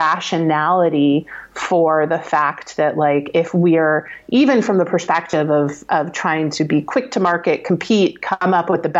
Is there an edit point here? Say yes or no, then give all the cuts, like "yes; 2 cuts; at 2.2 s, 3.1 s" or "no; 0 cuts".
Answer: no; 0 cuts